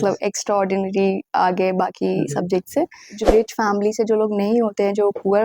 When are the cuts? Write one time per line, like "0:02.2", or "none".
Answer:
0:03.1